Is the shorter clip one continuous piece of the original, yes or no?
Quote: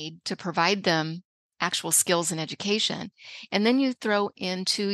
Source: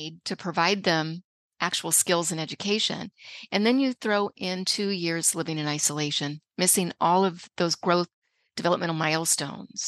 yes